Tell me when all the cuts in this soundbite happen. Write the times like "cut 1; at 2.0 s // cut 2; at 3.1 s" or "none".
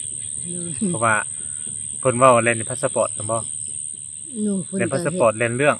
none